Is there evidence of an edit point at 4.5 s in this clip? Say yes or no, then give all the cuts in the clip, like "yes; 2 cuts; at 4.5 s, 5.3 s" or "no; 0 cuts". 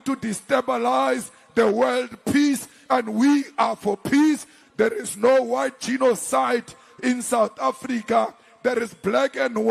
yes; 1 cut; at 4.5 s